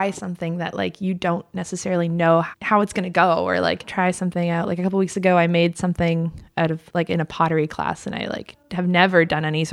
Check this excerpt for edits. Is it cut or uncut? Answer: cut